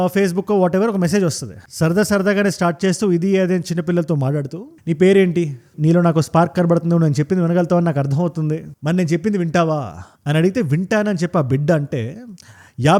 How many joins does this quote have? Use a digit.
0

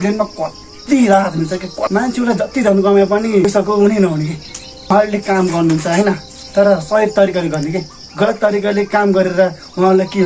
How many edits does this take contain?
1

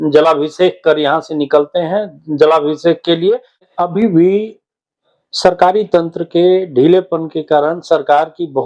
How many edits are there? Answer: 1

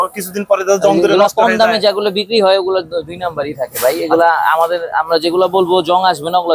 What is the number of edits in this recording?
0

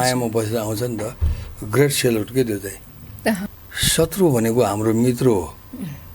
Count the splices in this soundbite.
1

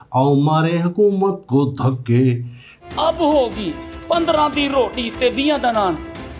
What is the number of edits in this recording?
1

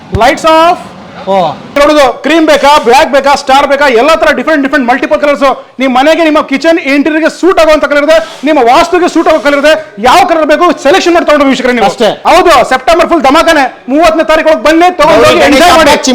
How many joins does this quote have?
2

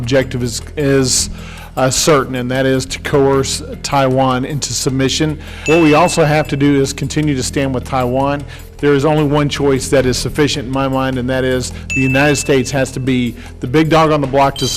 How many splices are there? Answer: 2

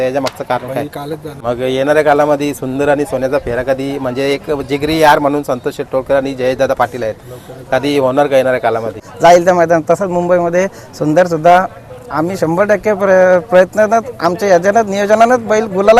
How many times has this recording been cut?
2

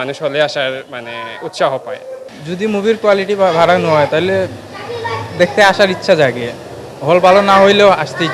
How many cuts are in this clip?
1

